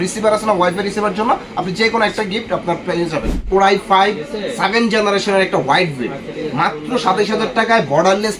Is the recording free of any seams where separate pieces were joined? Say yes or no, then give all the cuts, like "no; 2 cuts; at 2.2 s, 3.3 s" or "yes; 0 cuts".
no; 1 cut; at 3.4 s